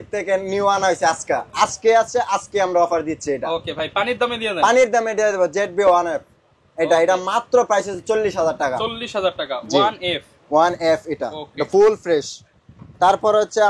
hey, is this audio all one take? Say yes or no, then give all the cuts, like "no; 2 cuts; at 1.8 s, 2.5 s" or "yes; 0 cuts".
yes; 0 cuts